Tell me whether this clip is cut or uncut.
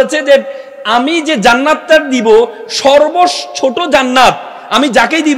uncut